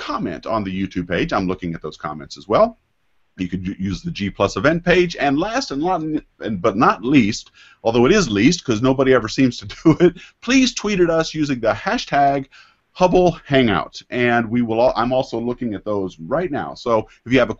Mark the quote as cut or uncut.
uncut